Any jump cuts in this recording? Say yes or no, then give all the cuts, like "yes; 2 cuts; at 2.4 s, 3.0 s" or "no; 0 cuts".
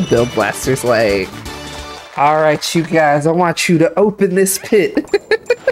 no; 0 cuts